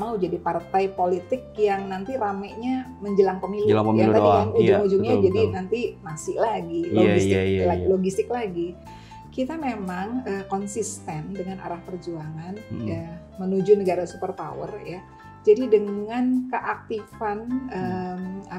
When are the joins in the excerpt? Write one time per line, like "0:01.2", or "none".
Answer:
none